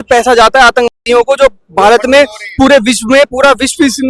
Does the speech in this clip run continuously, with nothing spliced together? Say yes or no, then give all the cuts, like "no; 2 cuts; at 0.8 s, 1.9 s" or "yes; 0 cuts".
yes; 0 cuts